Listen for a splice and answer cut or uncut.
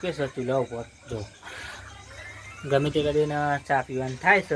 uncut